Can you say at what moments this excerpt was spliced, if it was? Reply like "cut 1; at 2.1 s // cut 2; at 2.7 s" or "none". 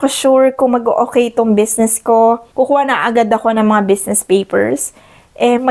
cut 1; at 2.4 s